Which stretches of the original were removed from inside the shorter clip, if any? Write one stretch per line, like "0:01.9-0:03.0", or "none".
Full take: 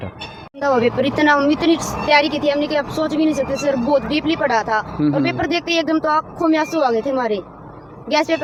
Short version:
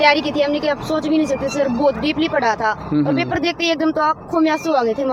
none